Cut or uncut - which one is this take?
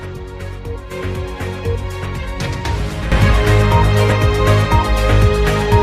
cut